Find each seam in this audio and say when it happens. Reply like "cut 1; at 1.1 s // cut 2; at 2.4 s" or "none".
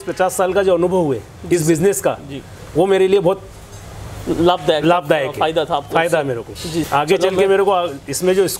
cut 1; at 6.9 s